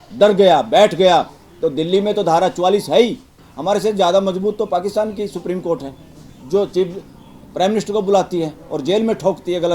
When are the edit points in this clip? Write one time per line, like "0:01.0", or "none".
0:03.5